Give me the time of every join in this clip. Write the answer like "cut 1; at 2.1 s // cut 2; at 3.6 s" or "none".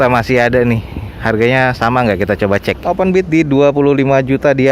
cut 1; at 2.7 s